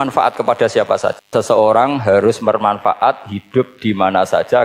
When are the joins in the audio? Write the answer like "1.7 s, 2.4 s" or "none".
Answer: 1.3 s